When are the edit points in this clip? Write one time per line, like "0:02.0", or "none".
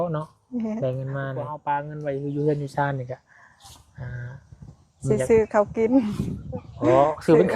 0:01.6